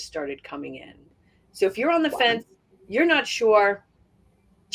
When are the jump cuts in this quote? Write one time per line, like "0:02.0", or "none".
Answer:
0:01.0

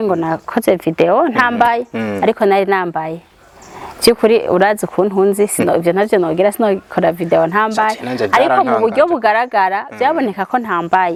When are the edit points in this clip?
none

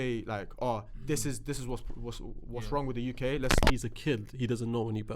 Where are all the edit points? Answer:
0:03.6

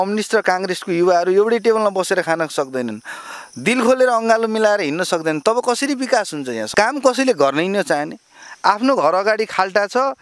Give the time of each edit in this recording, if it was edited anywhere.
0:06.6

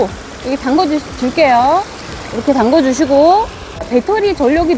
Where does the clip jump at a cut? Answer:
0:03.8

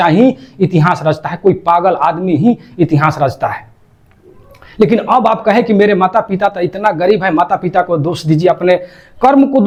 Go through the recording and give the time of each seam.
none

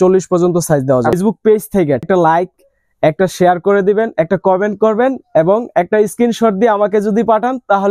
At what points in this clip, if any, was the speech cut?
0:01.1
0:02.1

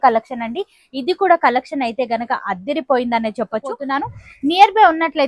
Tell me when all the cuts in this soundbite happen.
0:03.9

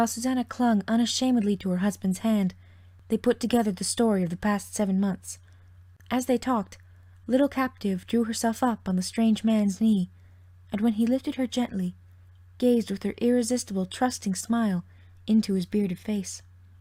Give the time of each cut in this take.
none

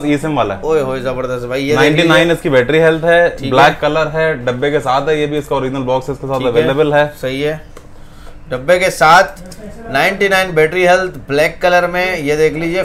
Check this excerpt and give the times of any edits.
none

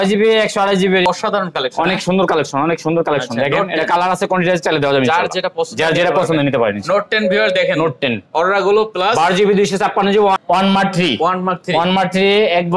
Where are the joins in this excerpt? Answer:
0:01.1
0:10.4

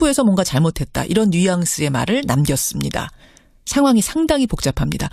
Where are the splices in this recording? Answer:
0:02.4

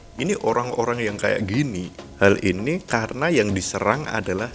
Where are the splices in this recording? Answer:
0:02.0

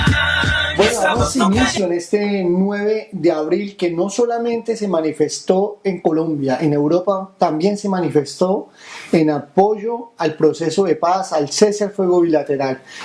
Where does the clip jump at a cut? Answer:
0:11.2

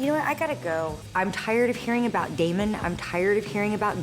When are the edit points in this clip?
0:01.1

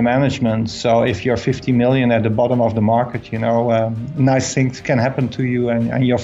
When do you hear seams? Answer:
none

